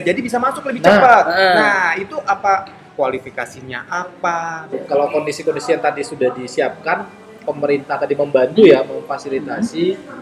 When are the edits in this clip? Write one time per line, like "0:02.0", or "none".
0:04.7